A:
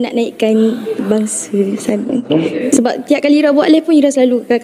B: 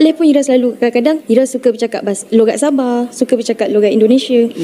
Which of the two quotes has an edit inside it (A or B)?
A